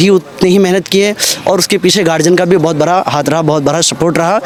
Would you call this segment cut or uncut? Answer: uncut